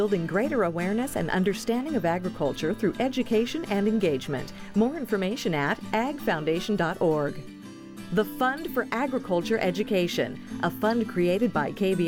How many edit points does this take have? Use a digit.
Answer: 0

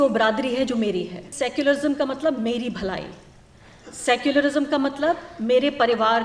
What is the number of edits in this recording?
1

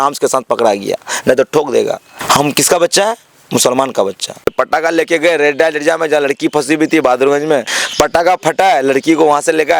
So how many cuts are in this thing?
3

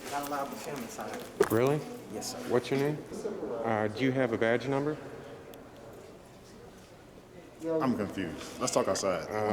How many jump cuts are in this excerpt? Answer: 1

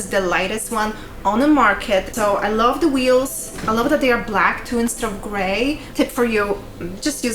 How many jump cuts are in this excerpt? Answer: 2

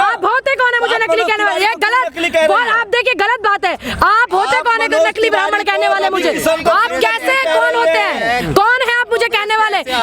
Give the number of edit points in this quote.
0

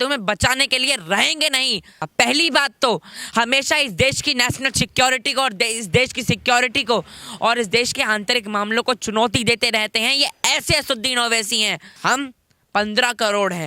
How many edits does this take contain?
2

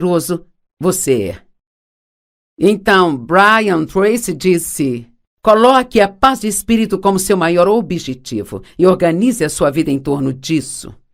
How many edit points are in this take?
1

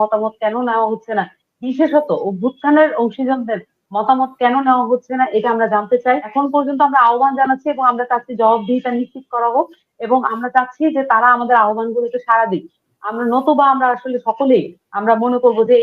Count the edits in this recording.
1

